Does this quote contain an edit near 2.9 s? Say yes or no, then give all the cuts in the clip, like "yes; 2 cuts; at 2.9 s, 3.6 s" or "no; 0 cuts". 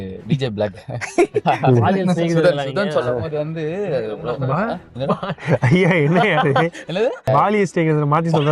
no; 1 cut; at 7.2 s